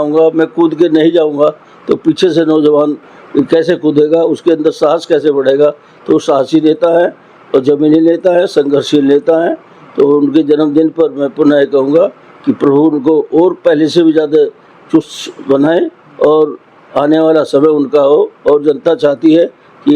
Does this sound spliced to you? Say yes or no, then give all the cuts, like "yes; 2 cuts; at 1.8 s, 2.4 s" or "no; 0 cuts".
no; 0 cuts